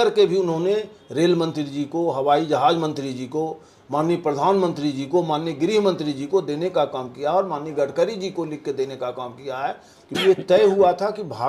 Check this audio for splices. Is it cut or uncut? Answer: cut